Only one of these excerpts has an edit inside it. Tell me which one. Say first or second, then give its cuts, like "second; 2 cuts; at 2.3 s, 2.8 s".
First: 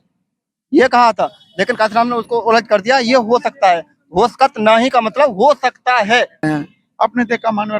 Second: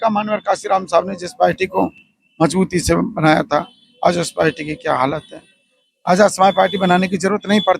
first; 1 cut; at 6.4 s